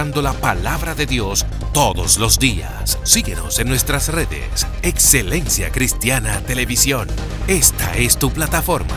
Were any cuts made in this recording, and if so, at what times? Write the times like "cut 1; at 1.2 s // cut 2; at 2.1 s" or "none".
none